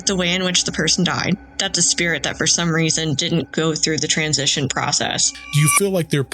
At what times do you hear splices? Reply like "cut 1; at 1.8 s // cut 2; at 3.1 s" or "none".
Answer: cut 1; at 1.5 s // cut 2; at 5.3 s